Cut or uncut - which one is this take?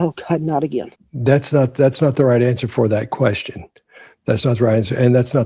cut